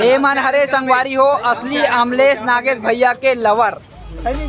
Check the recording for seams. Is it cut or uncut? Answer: uncut